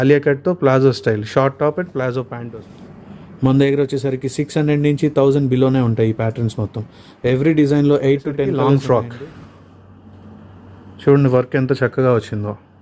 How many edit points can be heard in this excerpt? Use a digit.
2